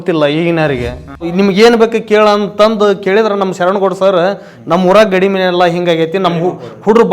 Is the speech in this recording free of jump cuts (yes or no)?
no